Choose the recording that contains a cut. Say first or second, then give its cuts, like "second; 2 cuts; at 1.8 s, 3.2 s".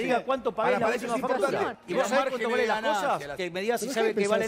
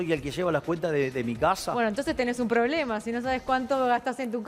first; 2 cuts; at 1.7 s, 3.4 s